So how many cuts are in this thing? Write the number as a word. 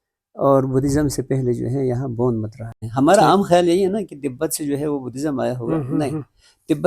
one